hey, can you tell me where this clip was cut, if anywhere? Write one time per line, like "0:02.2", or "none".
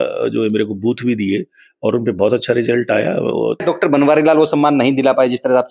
0:03.6